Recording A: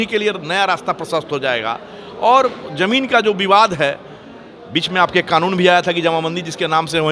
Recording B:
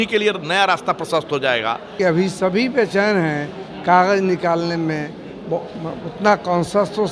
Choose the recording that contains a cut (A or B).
B